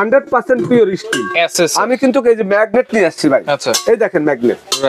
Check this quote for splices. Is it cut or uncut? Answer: uncut